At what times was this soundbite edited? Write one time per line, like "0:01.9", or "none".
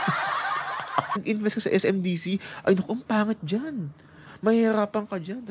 0:01.2